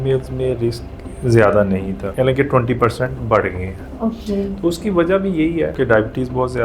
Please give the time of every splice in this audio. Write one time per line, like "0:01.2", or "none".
0:02.0
0:05.7